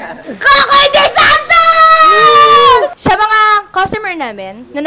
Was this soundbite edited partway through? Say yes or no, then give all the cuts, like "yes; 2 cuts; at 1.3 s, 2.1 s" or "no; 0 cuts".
yes; 1 cut; at 2.9 s